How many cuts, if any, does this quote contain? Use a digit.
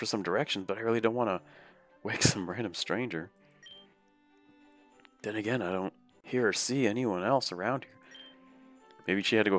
1